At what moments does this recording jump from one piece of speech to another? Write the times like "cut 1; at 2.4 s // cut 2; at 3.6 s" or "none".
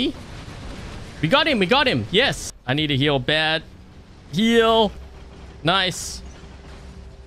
cut 1; at 2.5 s